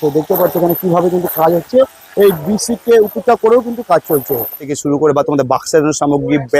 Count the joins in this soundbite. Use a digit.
1